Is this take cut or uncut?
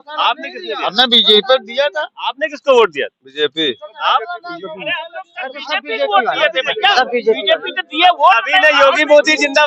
uncut